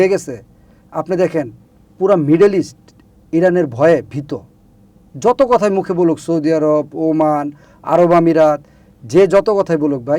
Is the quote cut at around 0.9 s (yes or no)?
no